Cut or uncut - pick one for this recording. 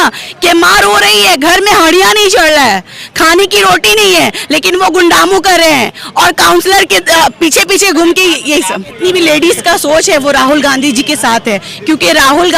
cut